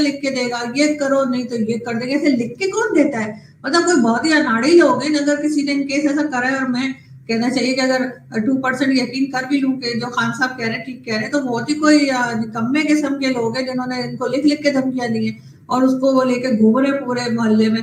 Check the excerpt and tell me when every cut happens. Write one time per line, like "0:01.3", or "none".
none